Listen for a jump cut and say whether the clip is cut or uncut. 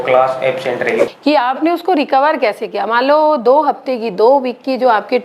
cut